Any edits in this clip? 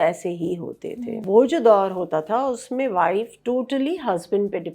yes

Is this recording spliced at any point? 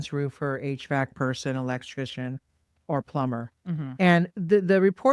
no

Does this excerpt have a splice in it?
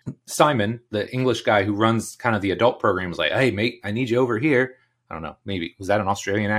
no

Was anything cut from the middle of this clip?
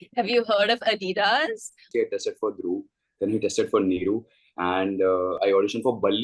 yes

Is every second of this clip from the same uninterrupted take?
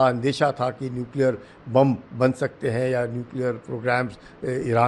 yes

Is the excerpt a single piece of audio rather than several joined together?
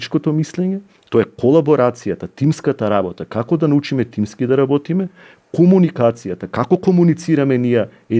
yes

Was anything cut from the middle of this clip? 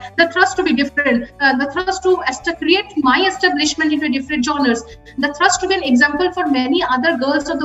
no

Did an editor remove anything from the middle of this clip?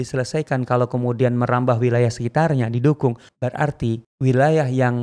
yes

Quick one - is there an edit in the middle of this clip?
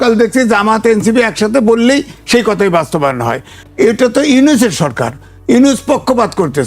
yes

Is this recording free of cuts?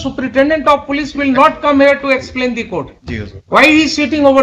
yes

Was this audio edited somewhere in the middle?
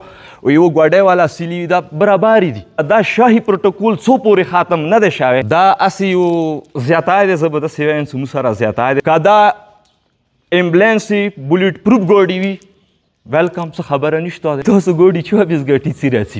yes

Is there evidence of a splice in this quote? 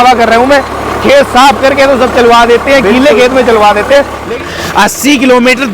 yes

